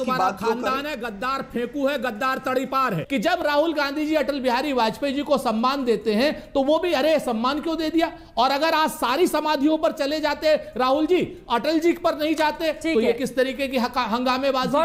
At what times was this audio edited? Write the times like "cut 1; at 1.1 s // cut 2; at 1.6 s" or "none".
cut 1; at 3.0 s